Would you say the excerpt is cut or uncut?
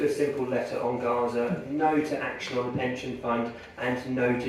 uncut